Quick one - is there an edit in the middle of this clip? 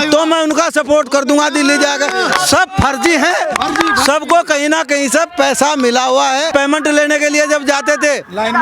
yes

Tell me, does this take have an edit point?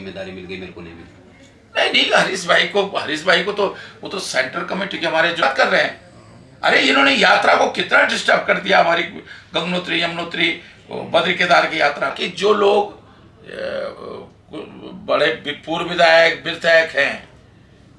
yes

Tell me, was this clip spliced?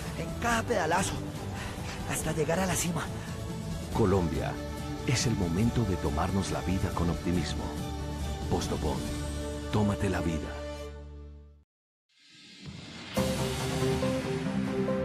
yes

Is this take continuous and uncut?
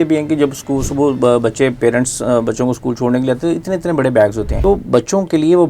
no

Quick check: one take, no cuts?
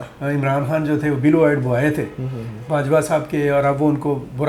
yes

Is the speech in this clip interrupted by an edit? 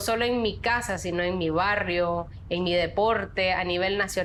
no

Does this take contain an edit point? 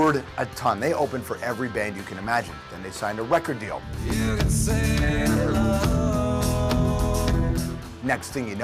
yes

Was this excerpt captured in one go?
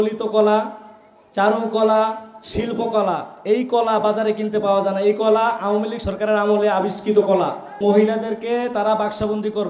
no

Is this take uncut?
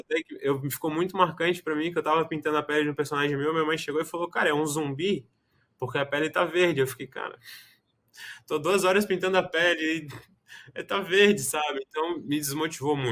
yes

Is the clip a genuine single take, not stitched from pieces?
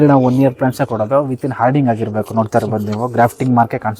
yes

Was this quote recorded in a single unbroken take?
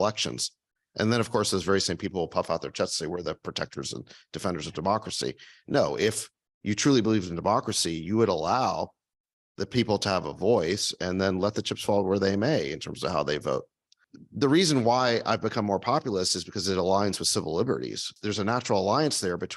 no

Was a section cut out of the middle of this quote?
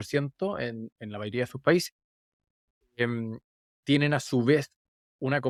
no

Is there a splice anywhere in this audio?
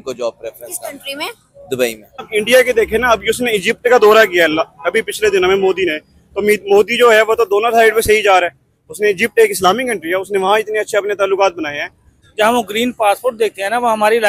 yes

